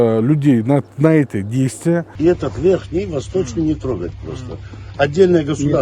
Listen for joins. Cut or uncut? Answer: cut